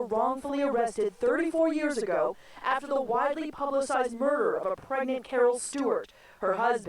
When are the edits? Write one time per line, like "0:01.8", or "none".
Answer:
0:00.9